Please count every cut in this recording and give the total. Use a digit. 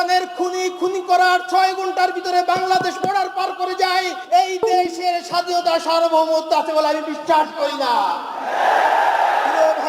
1